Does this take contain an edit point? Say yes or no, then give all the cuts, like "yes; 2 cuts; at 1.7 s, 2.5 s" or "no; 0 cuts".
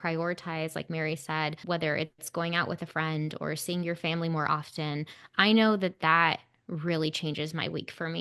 yes; 1 cut; at 1.6 s